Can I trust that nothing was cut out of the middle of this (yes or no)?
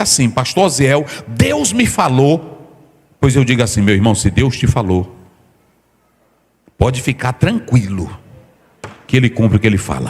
yes